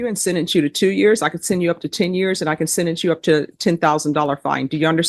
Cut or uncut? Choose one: uncut